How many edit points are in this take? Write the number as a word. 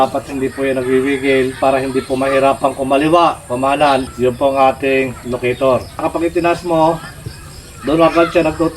three